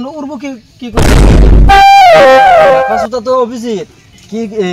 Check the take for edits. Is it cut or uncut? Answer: uncut